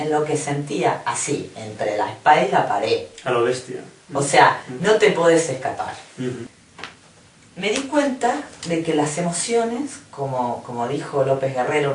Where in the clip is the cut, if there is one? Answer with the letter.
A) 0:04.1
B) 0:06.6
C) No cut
B